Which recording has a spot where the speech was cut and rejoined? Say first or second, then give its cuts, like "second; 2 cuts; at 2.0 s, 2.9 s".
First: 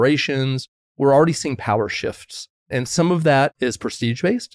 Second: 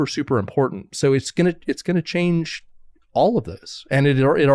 first; 3 cuts; at 0.9 s, 2.5 s, 3.5 s